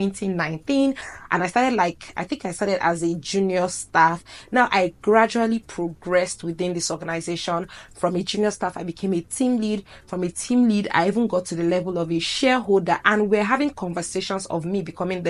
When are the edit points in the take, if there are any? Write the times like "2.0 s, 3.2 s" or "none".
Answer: none